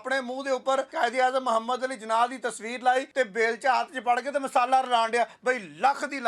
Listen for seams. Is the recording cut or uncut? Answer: cut